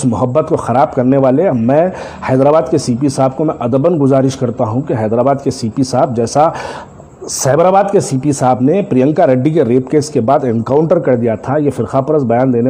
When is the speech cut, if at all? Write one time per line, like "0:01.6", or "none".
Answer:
none